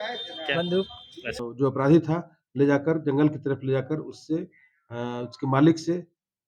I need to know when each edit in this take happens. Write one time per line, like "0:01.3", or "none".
0:01.4